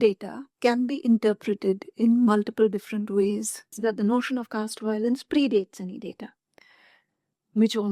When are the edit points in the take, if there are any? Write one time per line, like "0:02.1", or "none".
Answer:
0:03.8

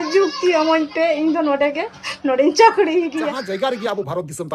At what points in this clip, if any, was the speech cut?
0:03.3

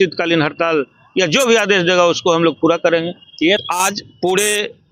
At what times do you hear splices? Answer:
0:03.6

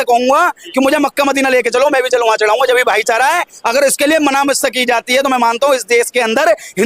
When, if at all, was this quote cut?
none

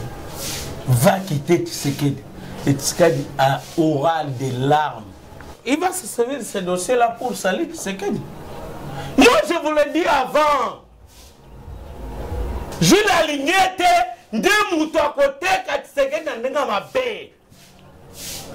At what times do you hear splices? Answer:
0:05.5
0:12.7

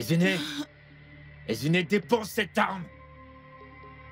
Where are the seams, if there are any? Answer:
0:02.9

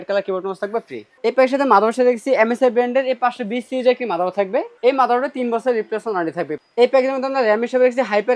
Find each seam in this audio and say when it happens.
0:01.0
0:04.7
0:06.5

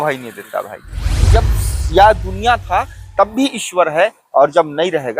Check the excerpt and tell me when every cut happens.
0:01.3

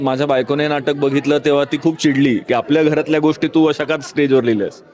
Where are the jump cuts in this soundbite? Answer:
none

